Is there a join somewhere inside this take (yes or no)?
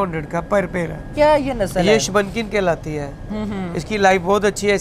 yes